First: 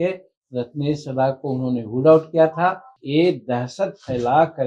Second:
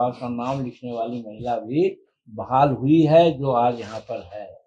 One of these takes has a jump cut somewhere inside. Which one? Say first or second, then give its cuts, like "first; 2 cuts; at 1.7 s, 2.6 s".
first; 1 cut; at 2.9 s